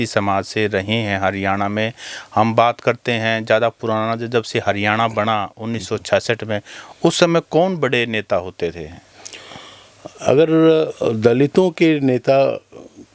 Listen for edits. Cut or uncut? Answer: uncut